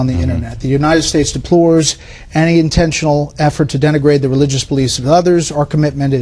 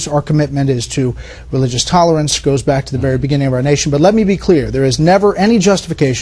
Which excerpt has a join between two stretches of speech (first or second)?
second